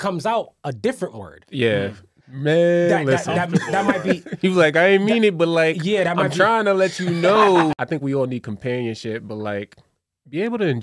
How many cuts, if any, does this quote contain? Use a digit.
1